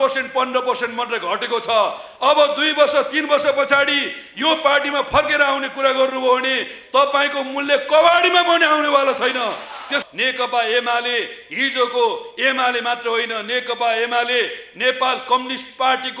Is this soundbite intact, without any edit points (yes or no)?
no